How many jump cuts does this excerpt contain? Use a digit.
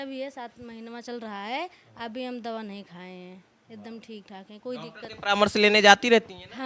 0